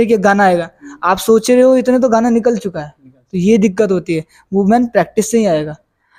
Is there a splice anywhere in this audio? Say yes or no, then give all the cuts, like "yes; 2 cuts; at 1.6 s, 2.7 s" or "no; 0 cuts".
no; 0 cuts